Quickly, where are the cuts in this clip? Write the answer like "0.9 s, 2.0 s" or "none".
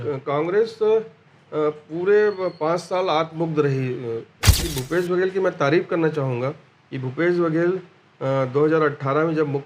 4.6 s